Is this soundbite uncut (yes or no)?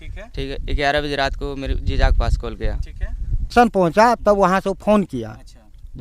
no